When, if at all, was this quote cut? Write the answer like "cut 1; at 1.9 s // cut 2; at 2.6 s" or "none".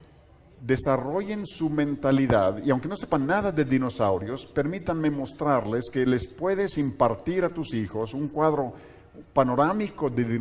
cut 1; at 2.6 s